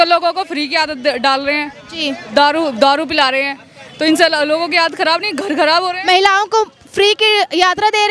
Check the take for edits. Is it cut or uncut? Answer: uncut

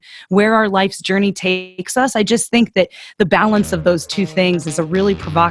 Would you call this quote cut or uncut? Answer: uncut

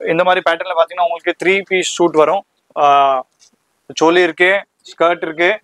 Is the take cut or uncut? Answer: uncut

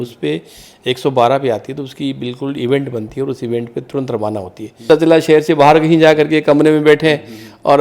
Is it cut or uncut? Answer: cut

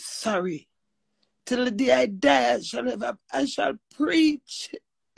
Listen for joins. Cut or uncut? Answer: uncut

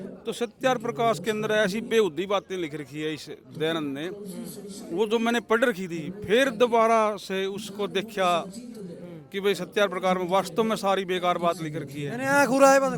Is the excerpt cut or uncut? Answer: uncut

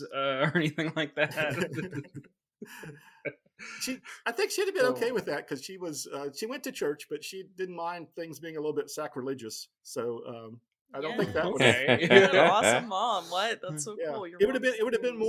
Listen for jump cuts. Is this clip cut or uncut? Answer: uncut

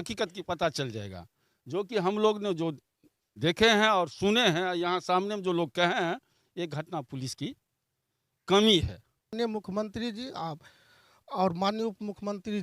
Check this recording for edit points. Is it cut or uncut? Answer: cut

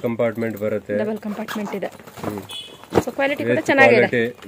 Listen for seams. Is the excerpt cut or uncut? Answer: uncut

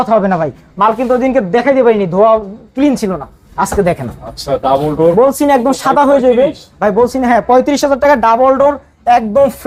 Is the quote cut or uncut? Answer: uncut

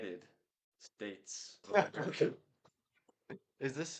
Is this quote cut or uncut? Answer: cut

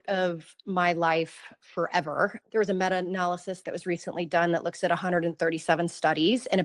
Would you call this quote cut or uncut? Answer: cut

